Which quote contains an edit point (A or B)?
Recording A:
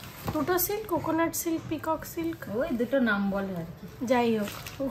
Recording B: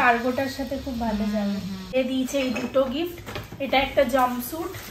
B